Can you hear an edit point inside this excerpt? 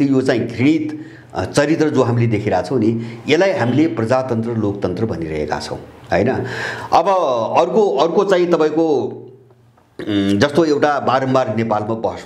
no; 0 cuts

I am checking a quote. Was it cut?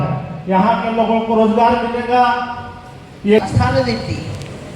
yes; 1 cut; at 3.4 s

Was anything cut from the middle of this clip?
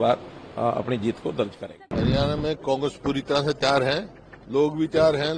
yes; 1 cut; at 1.7 s

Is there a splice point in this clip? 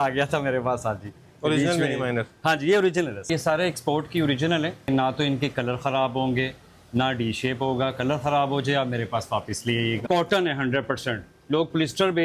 yes; 3 cuts; at 3.3 s, 4.9 s, 10.0 s

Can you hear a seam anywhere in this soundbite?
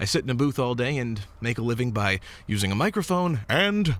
no; 0 cuts

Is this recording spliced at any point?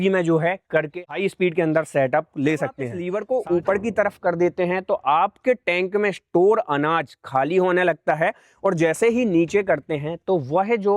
yes; 2 cuts; at 1.0 s, 2.9 s

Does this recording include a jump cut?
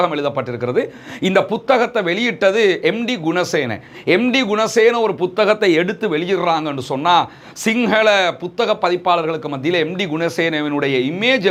no; 0 cuts

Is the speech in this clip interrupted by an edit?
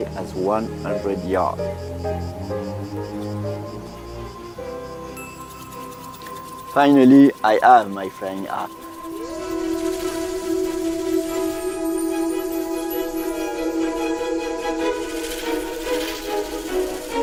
no; 0 cuts

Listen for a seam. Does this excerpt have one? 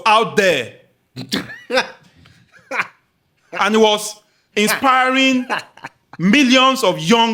no; 0 cuts

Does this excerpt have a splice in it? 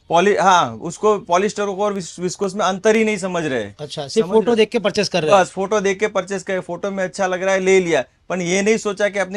no; 0 cuts

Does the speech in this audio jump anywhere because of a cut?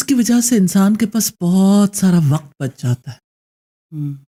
no; 0 cuts

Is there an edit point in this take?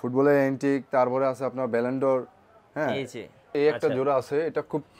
yes; 1 cut; at 3.5 s

